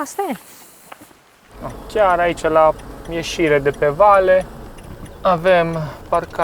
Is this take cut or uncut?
cut